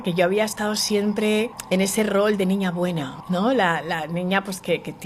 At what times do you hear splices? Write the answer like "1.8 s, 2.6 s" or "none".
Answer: 1.6 s, 3.1 s

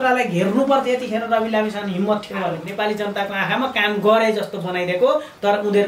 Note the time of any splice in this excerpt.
2.6 s

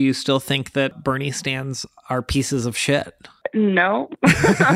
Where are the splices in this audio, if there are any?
0.9 s, 3.4 s

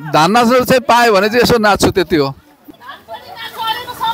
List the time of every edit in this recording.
2.6 s

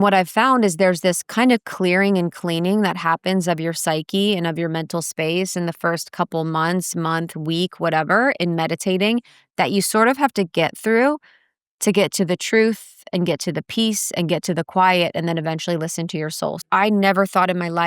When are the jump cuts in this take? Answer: 16.6 s

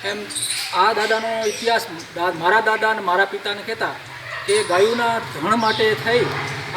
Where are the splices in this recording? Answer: none

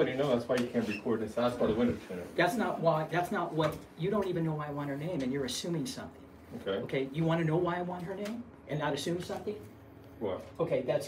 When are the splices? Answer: none

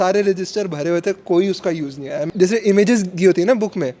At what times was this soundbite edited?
2.2 s

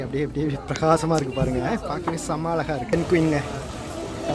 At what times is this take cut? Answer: 2.9 s

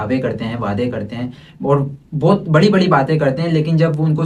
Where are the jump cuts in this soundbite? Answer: none

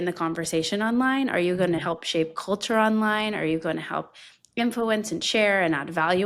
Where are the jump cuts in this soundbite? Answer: none

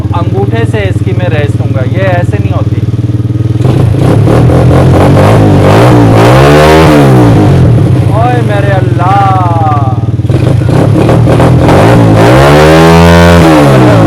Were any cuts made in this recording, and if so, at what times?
none

